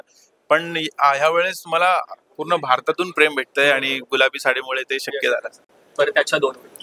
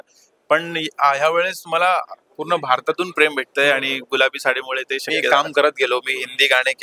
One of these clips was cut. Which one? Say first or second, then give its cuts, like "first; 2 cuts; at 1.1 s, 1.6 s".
second; 1 cut; at 5.3 s